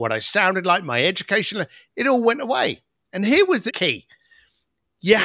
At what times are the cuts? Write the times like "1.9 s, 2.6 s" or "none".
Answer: 3.7 s